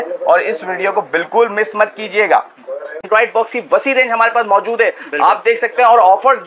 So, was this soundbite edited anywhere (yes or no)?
yes